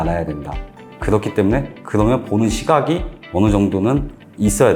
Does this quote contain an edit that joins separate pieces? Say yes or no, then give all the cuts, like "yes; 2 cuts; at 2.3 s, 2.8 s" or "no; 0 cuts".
no; 0 cuts